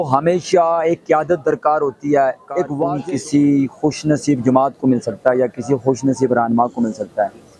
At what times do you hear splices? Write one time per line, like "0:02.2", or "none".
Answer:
0:02.9